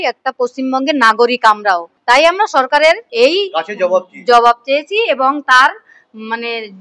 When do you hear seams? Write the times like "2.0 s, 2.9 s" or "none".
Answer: 1.9 s, 3.1 s